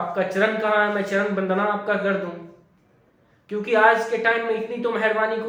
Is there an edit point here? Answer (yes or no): no